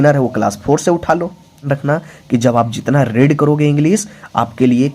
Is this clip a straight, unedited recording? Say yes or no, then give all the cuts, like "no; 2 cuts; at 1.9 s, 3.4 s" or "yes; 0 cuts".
no; 1 cut; at 1.7 s